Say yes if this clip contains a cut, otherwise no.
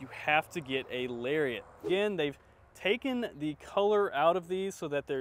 yes